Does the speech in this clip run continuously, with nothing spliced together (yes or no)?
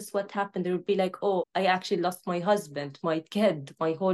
no